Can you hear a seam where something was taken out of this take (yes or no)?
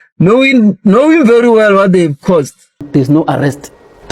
yes